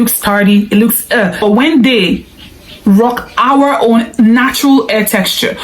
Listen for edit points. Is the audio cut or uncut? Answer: cut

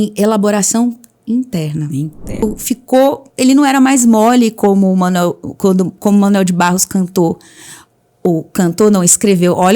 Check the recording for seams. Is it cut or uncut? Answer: cut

